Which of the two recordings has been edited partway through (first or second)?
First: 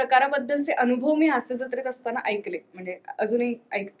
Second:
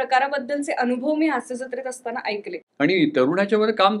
second